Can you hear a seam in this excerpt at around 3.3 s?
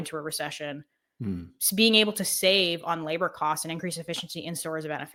no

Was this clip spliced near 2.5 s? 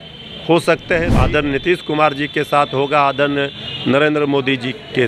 no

